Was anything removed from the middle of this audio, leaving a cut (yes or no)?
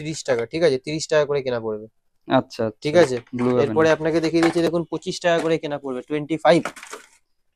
no